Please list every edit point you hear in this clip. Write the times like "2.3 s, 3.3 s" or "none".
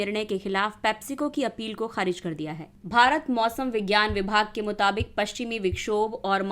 2.6 s